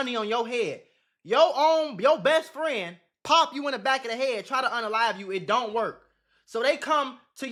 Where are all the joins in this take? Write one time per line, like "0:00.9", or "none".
none